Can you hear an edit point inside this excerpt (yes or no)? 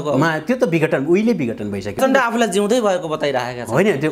yes